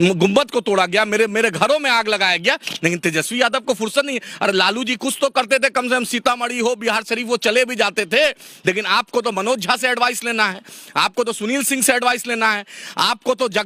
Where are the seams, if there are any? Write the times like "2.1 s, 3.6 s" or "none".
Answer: none